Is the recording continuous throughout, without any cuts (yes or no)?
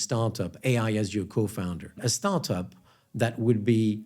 no